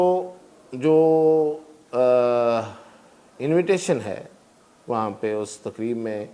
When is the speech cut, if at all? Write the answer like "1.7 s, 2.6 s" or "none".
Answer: none